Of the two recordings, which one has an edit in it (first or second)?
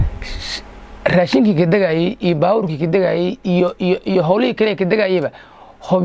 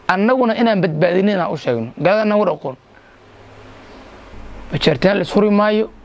second